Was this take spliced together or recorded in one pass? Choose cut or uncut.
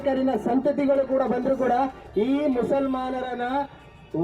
uncut